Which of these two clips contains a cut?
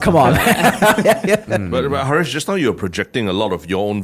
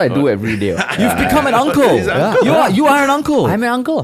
first; 1 cut; at 1.6 s

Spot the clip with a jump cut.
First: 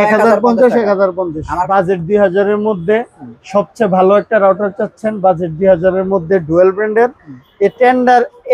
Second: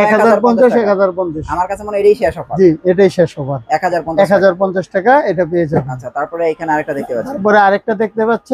first; 1 cut; at 1.5 s

